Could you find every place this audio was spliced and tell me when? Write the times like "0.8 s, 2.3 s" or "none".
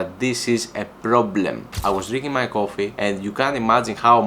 1.7 s, 2.9 s